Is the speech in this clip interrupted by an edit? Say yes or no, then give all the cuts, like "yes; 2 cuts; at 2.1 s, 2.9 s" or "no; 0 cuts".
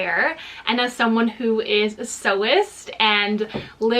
no; 0 cuts